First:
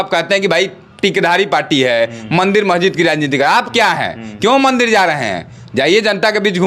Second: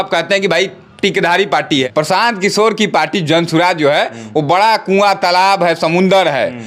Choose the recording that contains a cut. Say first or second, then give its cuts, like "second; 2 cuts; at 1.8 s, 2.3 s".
second; 1 cut; at 1.9 s